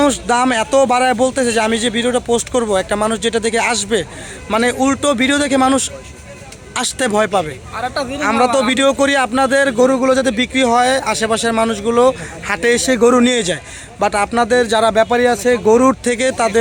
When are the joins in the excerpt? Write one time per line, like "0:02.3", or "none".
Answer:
none